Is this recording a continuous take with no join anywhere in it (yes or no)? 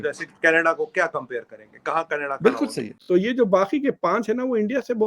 no